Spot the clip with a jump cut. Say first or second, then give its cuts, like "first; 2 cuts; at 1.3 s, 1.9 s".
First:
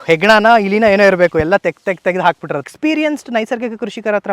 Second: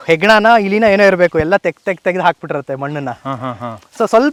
first; 1 cut; at 2.7 s